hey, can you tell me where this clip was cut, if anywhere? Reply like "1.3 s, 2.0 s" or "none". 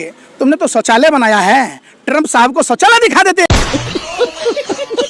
3.5 s